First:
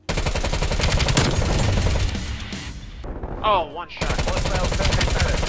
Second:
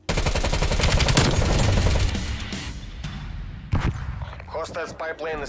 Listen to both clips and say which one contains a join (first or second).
first